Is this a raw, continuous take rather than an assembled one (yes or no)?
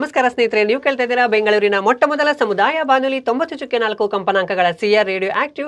yes